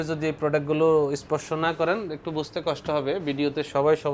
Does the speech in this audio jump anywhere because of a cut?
no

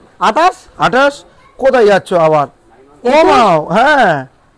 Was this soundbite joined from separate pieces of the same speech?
no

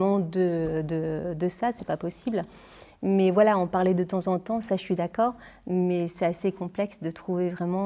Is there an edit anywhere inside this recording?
no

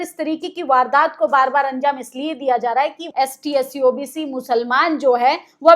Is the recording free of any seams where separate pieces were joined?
no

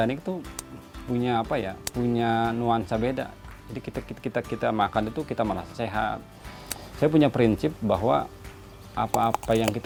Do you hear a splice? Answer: no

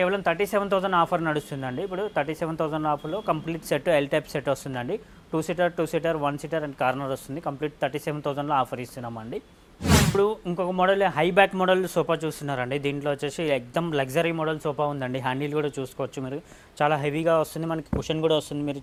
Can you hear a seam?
no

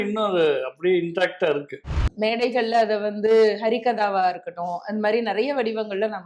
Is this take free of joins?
no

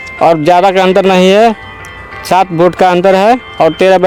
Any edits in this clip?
no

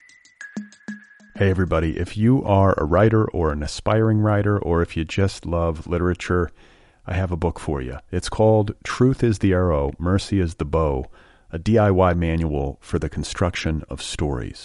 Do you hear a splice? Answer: yes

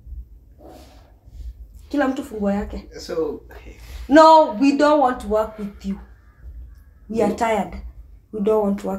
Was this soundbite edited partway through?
no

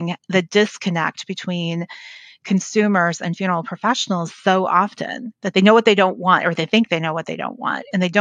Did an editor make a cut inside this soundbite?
yes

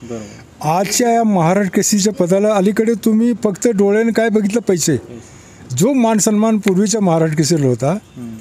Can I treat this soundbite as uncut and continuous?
yes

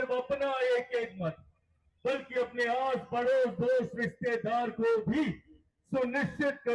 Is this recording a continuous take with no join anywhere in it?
yes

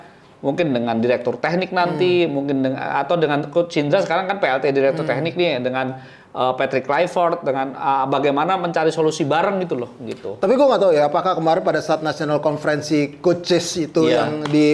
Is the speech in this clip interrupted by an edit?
no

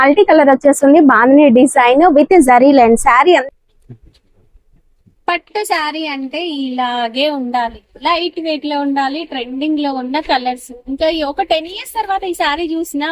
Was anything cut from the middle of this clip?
yes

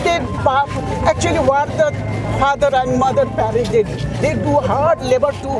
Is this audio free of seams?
yes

